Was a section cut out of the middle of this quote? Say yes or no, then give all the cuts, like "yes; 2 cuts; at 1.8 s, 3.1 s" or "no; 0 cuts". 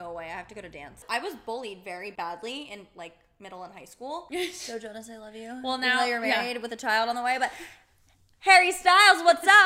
yes; 3 cuts; at 1.0 s, 2.1 s, 4.2 s